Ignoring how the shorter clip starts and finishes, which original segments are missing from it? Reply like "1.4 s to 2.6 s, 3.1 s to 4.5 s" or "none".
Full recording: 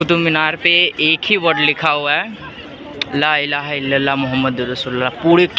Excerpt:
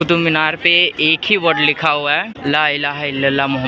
2.3 s to 3.0 s